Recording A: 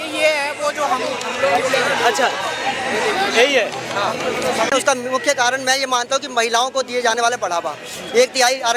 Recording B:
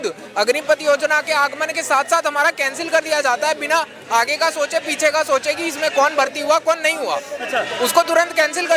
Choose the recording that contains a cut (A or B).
A